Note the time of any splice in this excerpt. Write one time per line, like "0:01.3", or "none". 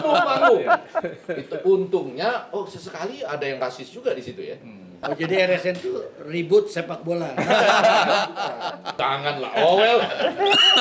0:05.0
0:08.9